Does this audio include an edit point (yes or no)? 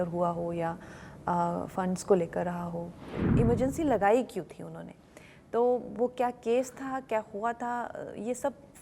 yes